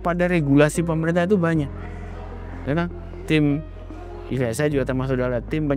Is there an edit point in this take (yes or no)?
no